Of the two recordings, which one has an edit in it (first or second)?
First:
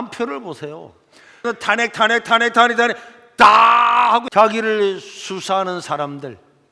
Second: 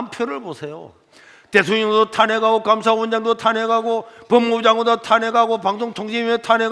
first